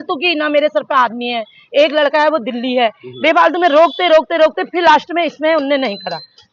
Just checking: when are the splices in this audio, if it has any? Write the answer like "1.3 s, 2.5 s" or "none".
none